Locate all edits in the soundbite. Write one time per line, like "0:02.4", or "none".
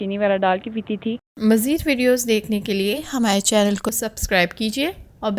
0:01.3